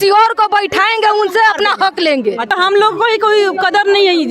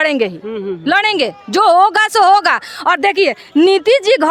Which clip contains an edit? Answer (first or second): first